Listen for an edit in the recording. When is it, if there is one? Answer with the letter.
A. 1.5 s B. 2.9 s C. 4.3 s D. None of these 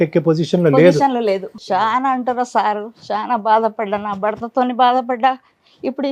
A